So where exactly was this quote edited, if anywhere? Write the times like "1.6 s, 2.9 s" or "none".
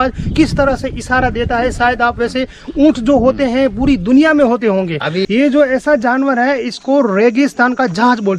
5.2 s